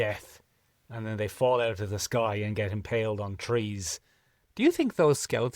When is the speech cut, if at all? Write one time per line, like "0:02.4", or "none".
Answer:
0:04.5